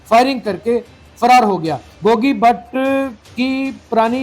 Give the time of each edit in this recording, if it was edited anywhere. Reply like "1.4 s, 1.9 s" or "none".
1.8 s